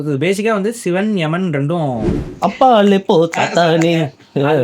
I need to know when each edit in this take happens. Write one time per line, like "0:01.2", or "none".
0:02.2

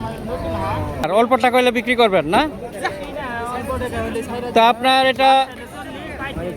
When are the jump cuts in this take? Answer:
0:01.0

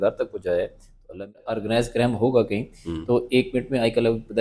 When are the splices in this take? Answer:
0:01.5

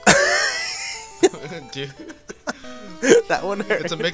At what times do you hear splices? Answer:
none

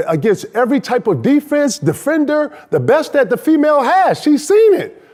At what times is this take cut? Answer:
none

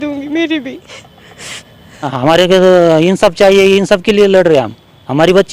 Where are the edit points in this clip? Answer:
0:02.1

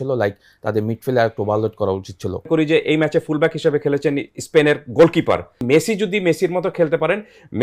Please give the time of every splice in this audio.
0:02.5
0:05.6

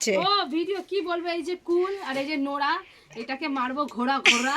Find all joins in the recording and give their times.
none

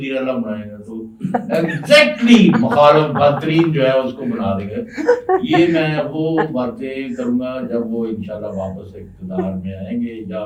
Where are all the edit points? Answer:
none

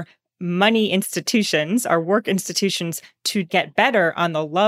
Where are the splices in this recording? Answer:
0:03.5

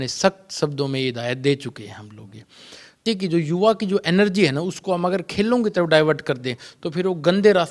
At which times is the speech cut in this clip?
0:03.0

